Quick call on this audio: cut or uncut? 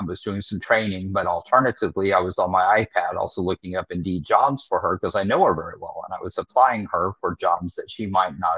uncut